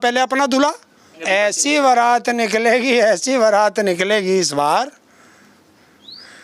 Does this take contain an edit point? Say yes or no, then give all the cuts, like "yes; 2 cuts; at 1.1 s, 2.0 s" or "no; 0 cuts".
yes; 1 cut; at 1.1 s